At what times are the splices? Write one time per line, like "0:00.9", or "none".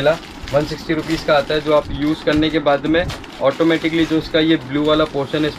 none